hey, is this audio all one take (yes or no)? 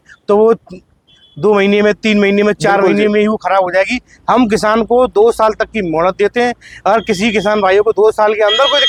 yes